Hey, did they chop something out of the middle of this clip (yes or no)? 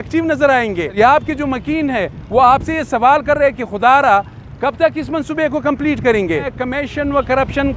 yes